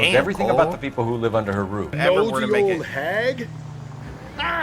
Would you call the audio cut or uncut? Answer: cut